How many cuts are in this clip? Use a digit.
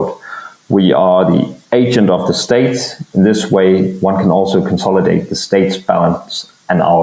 0